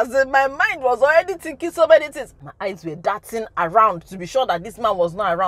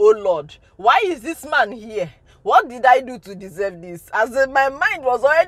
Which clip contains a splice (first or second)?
first